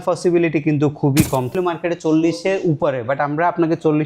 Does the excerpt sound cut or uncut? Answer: cut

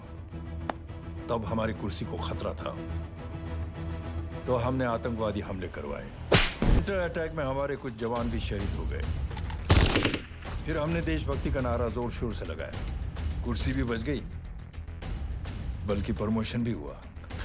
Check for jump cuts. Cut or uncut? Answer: cut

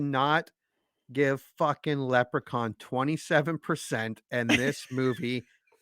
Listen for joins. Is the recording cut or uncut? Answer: uncut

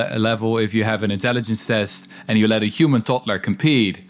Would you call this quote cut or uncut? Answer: uncut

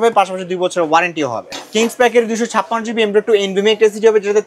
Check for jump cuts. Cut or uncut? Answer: cut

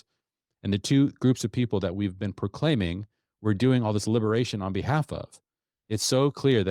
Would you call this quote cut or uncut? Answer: uncut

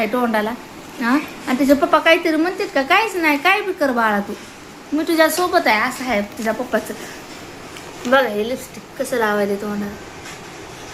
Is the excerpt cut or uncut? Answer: uncut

